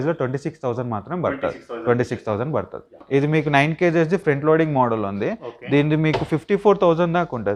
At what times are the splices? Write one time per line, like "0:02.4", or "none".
0:02.9